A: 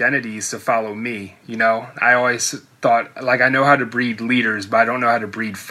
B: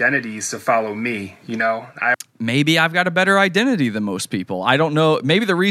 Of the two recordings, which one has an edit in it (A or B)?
A